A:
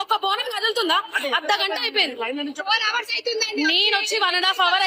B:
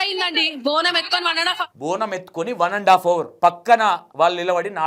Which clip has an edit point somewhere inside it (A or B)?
B